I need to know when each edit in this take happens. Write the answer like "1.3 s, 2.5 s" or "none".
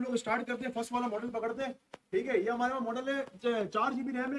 none